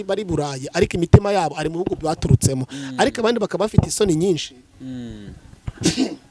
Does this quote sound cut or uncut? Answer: uncut